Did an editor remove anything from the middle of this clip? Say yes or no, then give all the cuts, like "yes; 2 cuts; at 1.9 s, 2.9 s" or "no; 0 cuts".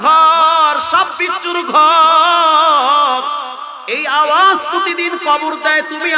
no; 0 cuts